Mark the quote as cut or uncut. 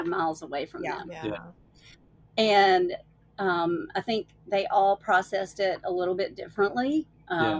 uncut